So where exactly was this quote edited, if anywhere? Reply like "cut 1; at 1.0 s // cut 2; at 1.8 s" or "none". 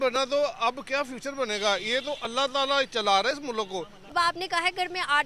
cut 1; at 4.1 s

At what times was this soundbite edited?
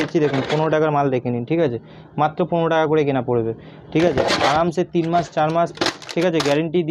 none

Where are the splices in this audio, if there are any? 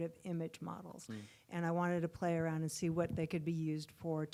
none

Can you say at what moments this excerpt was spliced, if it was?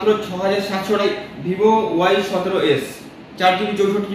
cut 1; at 1.0 s

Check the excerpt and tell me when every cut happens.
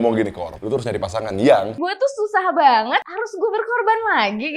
cut 1; at 1.7 s

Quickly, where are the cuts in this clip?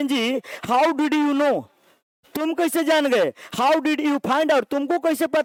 none

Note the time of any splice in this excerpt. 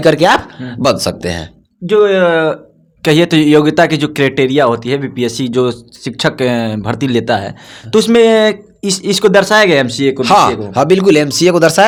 none

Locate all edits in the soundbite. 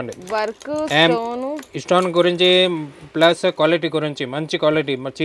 none

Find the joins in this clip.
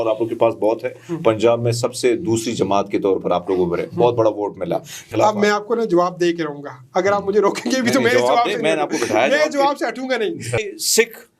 cut 1; at 5.0 s // cut 2; at 10.6 s

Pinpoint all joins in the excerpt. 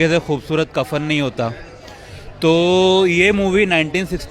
none

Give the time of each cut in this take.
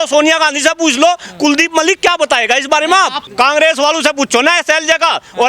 cut 1; at 3.2 s

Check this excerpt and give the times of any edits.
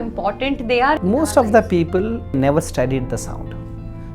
cut 1; at 1.0 s // cut 2; at 2.4 s

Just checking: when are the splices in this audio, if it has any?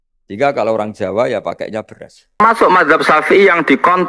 cut 1; at 2.4 s

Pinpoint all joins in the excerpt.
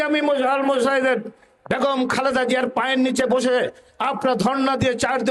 none

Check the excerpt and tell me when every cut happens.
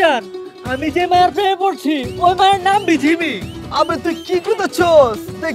none

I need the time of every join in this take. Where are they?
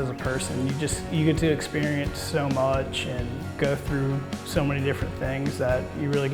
none

